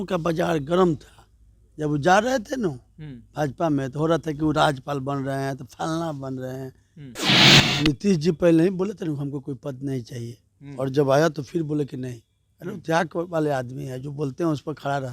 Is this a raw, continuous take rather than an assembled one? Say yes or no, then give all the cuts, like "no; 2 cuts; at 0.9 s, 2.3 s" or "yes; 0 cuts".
no; 1 cut; at 7.3 s